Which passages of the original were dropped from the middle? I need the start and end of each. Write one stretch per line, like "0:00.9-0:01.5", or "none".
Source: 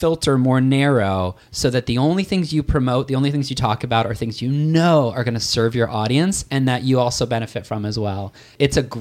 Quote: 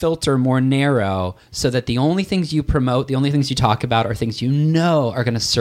none